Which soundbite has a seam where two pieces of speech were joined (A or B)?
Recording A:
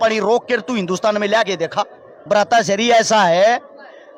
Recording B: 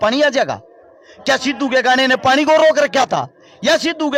A